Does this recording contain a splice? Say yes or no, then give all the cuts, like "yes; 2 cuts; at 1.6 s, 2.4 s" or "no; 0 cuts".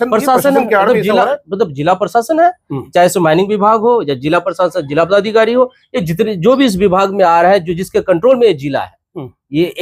no; 0 cuts